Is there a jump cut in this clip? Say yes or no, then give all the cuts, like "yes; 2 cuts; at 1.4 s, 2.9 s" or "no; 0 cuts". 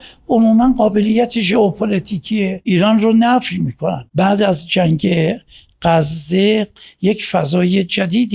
yes; 2 cuts; at 2.6 s, 4.0 s